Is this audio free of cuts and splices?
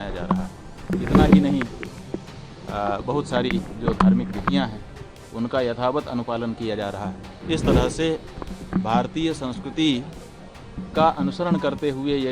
no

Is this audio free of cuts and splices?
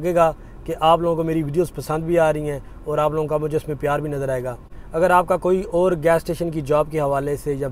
yes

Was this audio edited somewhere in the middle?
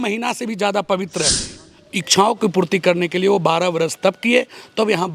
yes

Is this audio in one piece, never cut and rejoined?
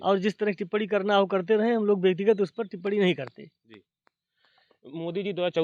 yes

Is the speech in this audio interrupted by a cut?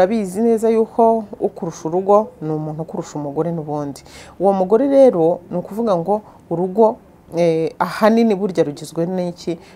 no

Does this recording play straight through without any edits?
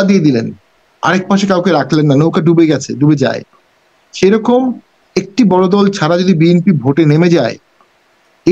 yes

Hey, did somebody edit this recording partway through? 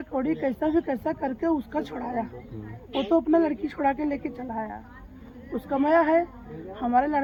no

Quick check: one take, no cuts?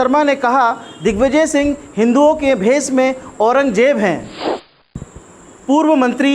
no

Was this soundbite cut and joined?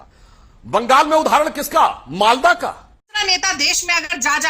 yes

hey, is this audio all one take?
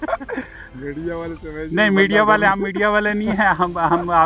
yes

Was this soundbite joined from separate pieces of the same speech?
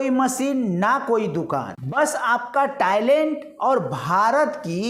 no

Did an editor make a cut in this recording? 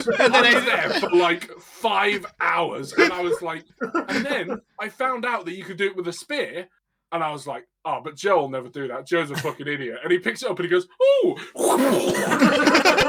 no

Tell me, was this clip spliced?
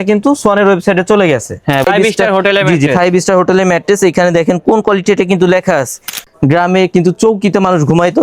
yes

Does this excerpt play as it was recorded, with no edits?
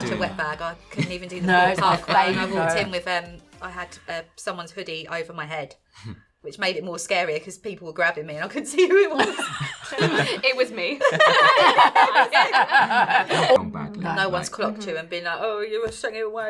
no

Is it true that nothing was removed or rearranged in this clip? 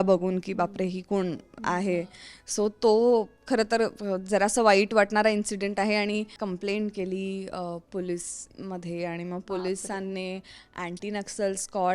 no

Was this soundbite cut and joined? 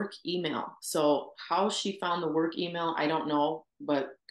no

